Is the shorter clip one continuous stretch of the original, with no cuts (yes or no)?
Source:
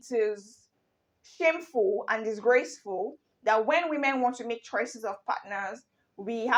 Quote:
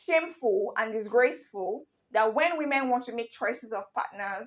yes